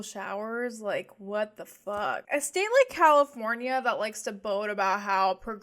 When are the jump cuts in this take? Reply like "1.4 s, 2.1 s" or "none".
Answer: 2.2 s